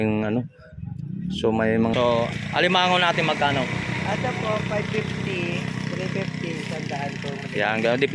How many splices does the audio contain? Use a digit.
1